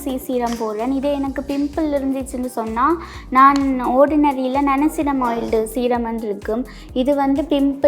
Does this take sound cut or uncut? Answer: uncut